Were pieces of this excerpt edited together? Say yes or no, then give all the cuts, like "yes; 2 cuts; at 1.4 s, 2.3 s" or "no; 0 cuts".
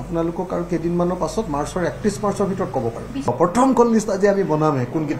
yes; 1 cut; at 3.3 s